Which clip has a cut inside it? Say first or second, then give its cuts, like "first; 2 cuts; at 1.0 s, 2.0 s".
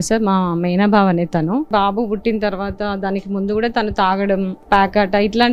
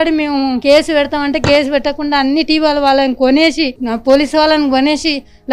first; 2 cuts; at 1.7 s, 4.6 s